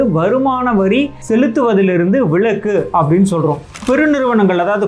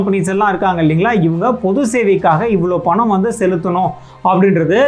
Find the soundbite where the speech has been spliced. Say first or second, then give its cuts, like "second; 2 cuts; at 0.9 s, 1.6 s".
first; 2 cuts; at 1.2 s, 3.8 s